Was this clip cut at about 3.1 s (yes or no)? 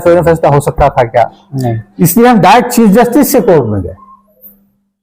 no